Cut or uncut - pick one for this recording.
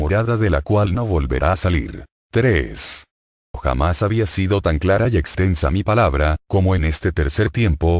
cut